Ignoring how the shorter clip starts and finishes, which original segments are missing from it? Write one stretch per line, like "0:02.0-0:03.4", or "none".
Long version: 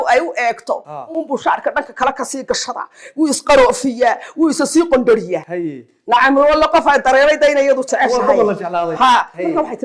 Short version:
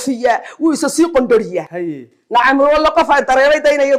none